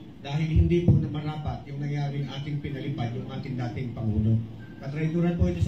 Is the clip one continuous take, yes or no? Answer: yes